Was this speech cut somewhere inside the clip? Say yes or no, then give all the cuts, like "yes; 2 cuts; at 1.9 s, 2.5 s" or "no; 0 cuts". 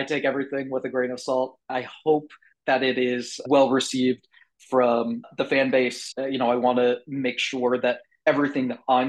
yes; 1 cut; at 3.4 s